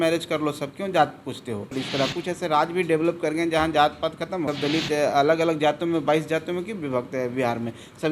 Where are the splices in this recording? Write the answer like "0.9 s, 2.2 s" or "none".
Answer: 1.8 s, 4.5 s